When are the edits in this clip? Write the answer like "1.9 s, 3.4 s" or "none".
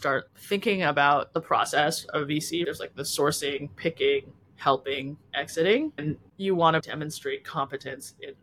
2.6 s, 6.0 s, 6.8 s